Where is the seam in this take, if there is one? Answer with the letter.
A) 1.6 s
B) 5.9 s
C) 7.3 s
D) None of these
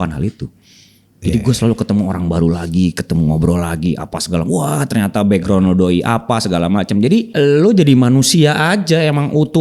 C